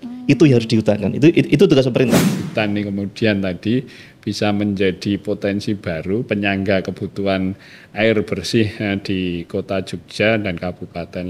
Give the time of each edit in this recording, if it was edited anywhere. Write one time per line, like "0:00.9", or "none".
0:02.4